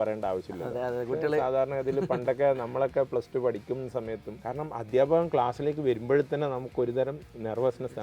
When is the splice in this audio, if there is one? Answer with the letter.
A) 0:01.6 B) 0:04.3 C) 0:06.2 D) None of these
B